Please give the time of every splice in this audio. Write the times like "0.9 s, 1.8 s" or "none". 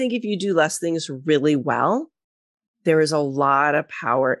none